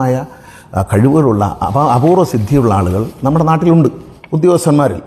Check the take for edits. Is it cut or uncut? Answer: uncut